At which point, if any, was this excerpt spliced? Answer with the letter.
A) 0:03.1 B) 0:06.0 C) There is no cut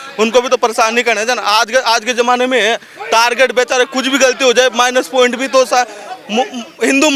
C